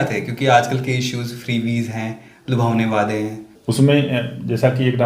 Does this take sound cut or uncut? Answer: cut